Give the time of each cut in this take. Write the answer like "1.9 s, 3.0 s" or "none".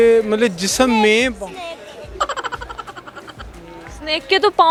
none